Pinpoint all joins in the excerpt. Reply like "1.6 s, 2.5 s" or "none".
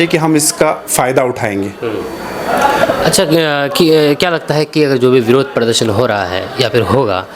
none